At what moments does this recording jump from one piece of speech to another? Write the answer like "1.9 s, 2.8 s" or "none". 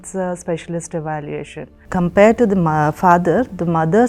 1.7 s